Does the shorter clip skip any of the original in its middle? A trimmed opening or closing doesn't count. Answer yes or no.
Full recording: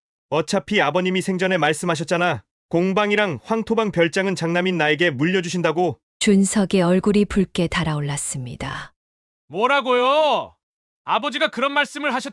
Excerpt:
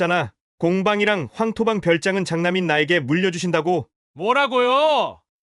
yes